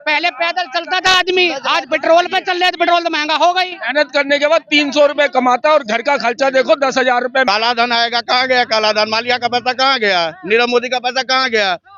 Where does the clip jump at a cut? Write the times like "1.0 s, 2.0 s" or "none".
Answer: 7.5 s